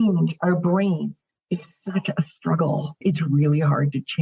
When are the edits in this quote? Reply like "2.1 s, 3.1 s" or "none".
3.0 s